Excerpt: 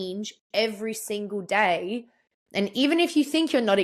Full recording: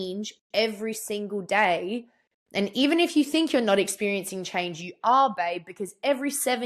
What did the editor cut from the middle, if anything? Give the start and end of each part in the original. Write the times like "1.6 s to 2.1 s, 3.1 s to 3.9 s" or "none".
none

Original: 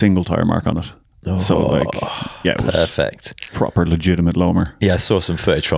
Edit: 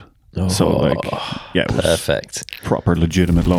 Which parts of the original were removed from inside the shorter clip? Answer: none

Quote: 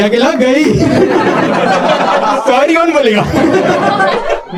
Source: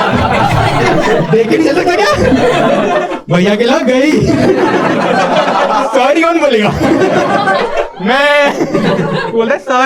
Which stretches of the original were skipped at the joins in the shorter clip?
none

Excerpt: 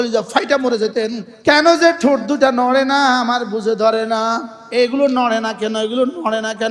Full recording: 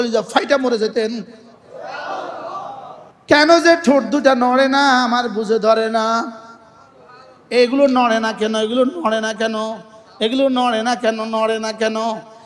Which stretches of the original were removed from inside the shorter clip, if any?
1.3 s to 3.1 s, 6.4 s to 7.3 s

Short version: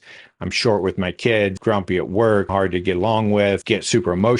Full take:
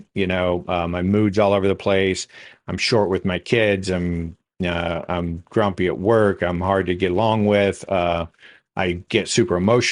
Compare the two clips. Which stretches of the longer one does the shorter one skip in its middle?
3.8 s to 5.5 s, 6.4 s to 6.6 s, 7.8 s to 9.1 s

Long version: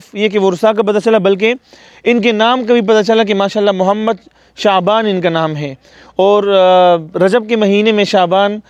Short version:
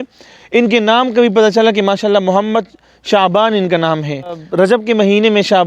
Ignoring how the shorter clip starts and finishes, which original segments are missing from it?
6.0 s to 7.1 s

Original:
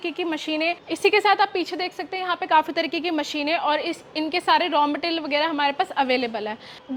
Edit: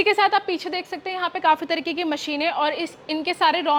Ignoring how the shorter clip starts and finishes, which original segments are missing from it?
none

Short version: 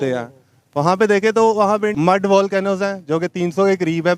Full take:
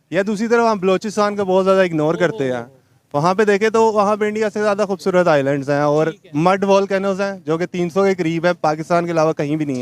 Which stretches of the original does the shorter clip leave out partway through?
4.3 s to 6.3 s

